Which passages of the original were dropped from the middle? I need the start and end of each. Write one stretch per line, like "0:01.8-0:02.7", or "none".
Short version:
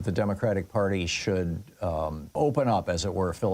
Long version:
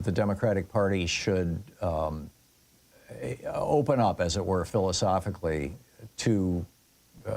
0:02.3-0:03.7